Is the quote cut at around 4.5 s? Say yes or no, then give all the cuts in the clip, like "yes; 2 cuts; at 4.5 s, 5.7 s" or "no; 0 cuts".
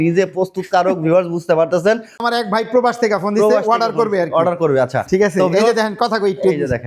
no; 1 cut; at 2.2 s